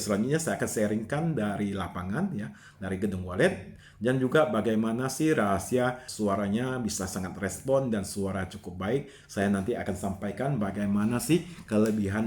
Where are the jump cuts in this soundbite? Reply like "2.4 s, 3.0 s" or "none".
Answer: 6.0 s